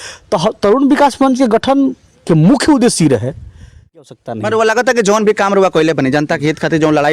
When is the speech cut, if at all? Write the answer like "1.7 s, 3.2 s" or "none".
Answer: 4.1 s